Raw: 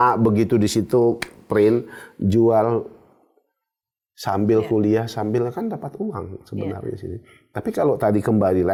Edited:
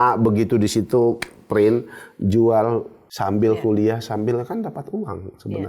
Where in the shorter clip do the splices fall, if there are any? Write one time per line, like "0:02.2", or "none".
0:03.0